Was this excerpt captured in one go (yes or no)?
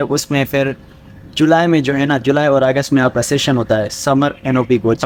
yes